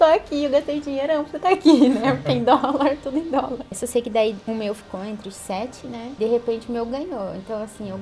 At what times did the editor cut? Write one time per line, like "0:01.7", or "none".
0:03.8
0:04.4
0:06.2